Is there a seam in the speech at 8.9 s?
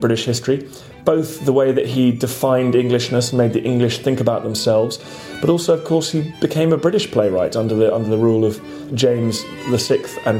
yes; 2 cuts; at 8.9 s, 9.5 s

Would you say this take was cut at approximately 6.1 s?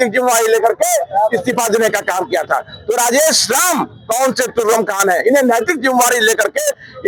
no; 0 cuts

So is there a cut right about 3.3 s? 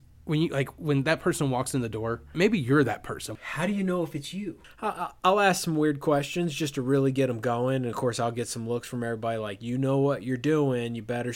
yes; 3 cuts; at 2.3 s, 3.3 s, 4.6 s

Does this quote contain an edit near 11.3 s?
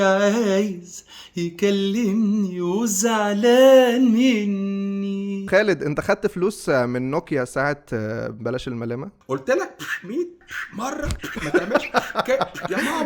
no; 2 cuts; at 5.4 s, 9.1 s

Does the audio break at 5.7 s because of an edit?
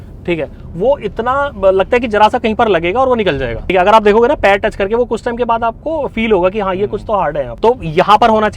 no; 2 cuts; at 3.7 s, 7.5 s

